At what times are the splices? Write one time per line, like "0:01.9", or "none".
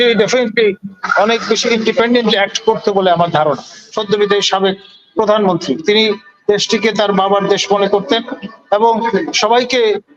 0:03.9